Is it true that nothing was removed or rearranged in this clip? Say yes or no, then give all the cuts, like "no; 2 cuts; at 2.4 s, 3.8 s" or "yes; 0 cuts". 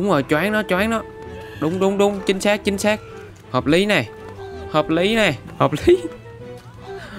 no; 1 cut; at 5.5 s